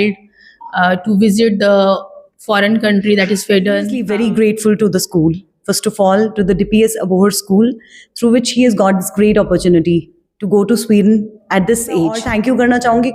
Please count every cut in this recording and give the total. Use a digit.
2